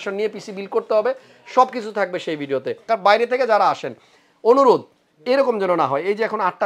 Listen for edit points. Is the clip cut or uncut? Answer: cut